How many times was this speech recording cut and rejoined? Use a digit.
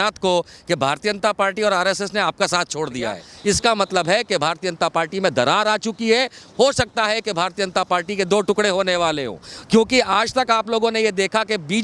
1